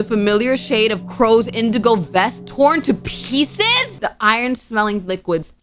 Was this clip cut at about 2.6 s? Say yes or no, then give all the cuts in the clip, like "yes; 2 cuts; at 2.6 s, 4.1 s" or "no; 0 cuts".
no; 1 cut; at 3.9 s